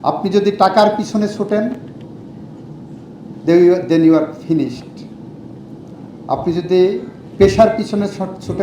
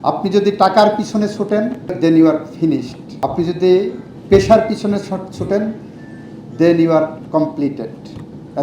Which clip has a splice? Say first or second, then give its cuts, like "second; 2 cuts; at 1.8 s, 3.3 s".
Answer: second; 2 cuts; at 2.0 s, 3.0 s